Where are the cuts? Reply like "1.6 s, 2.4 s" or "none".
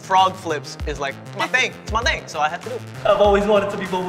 2.9 s